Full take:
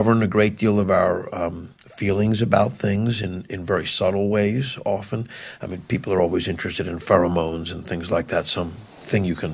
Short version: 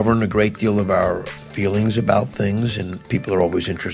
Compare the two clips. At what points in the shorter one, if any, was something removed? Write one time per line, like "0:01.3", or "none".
0:01.3
0:02.9